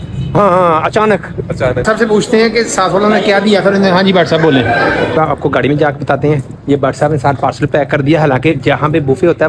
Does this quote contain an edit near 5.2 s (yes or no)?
yes